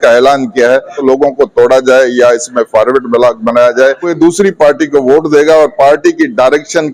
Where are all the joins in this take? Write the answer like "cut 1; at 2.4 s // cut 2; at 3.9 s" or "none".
cut 1; at 1.0 s // cut 2; at 4.1 s